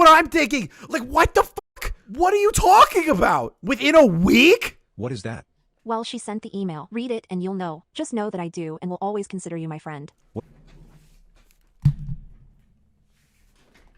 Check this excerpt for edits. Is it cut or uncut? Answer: cut